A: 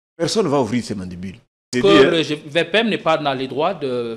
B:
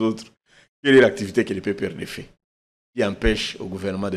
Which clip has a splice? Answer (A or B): A